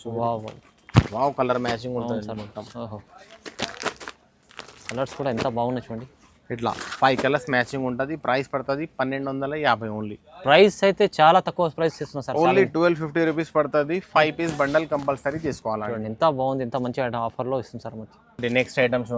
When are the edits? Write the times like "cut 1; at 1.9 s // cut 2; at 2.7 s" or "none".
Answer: none